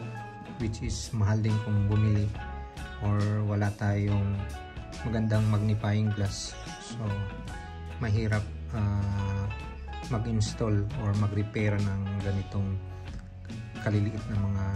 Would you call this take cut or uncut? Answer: cut